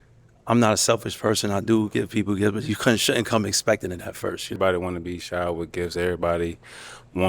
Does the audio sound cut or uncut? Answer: cut